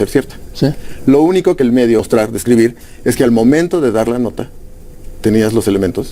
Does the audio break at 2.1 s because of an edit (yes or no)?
yes